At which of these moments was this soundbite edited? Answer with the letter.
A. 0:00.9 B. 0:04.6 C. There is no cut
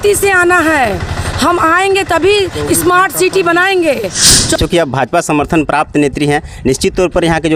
B